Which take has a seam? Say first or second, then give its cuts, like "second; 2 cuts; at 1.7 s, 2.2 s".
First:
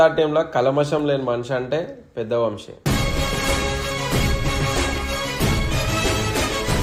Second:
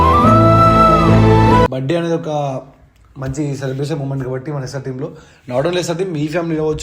second; 1 cut; at 1.7 s